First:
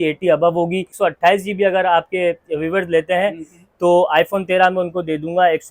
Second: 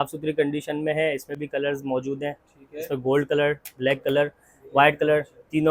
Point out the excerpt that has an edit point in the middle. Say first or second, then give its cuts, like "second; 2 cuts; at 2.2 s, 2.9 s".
first; 1 cut; at 0.9 s